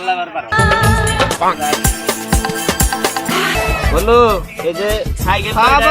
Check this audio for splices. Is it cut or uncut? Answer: cut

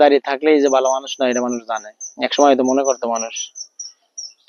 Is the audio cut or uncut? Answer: uncut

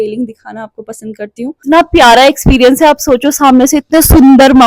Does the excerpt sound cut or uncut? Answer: cut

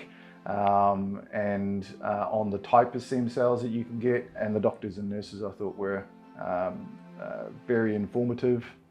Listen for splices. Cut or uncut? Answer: cut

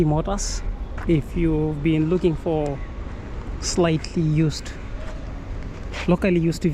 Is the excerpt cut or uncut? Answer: uncut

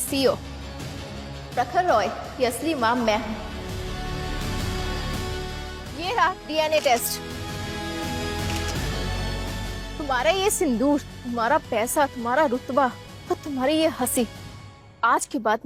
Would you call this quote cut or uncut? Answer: uncut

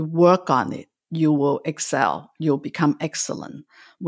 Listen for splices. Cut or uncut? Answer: uncut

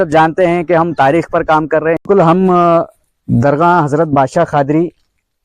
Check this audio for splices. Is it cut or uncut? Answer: cut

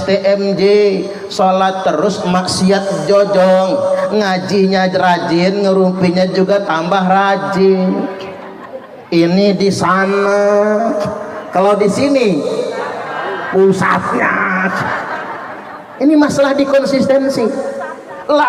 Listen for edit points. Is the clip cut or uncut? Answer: uncut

